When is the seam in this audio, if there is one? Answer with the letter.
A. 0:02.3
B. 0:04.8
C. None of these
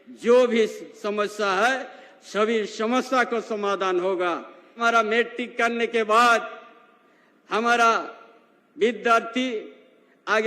B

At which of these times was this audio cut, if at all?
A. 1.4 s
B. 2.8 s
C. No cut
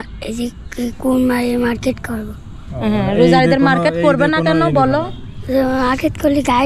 C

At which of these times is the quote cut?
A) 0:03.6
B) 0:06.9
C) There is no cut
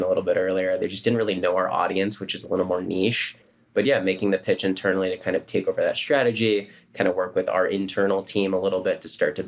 A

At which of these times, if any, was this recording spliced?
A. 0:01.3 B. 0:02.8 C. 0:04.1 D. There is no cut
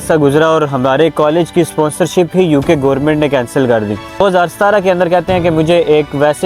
C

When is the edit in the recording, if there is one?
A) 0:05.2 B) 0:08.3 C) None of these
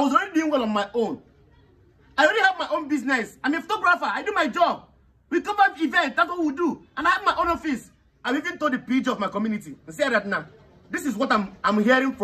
B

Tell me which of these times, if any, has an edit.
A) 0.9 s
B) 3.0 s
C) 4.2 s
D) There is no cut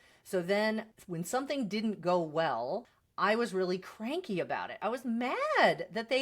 B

